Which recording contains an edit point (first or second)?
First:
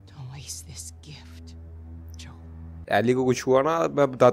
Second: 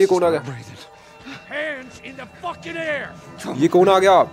first